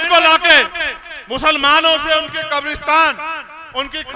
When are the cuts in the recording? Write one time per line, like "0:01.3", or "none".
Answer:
none